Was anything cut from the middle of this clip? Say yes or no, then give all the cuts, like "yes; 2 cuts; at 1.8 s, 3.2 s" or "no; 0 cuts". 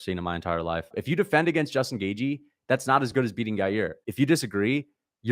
yes; 2 cuts; at 0.9 s, 4.0 s